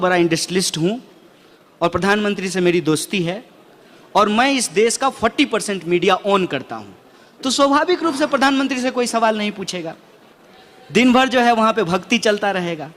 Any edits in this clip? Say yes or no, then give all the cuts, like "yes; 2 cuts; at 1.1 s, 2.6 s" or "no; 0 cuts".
no; 0 cuts